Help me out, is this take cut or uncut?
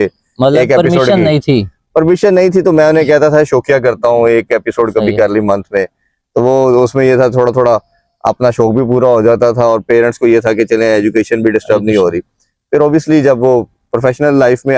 uncut